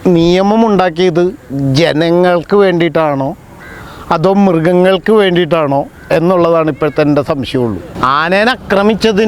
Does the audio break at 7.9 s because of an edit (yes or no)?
yes